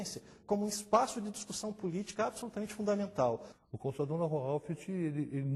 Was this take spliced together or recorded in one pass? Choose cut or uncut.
cut